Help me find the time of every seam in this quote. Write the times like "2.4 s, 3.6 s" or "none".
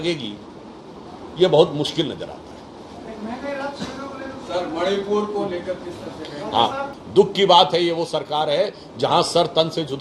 7.0 s